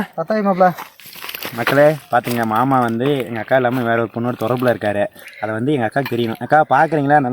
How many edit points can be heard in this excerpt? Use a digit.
1